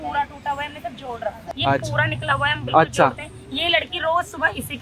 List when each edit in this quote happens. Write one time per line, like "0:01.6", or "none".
0:01.4